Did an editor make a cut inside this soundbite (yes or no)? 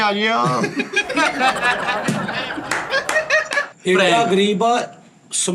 yes